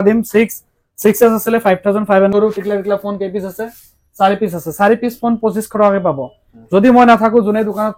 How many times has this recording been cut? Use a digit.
1